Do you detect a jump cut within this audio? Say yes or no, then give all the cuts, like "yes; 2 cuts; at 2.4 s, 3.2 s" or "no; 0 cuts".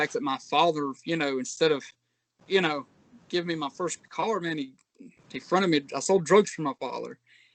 no; 0 cuts